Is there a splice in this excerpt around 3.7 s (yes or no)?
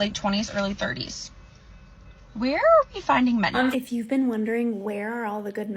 yes